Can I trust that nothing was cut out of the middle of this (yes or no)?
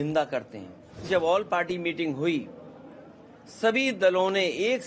no